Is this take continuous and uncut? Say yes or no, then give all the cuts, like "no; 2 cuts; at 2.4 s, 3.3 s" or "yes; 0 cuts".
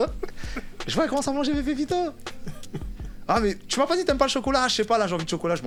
yes; 0 cuts